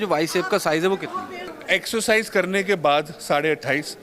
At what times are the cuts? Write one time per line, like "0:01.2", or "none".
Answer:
0:01.6